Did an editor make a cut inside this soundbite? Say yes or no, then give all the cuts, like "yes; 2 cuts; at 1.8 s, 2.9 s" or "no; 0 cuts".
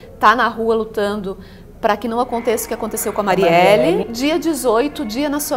yes; 1 cut; at 4.1 s